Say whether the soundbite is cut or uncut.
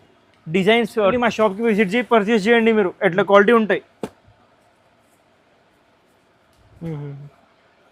cut